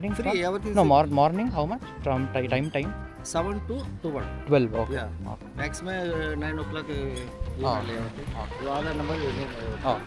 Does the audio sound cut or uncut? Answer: uncut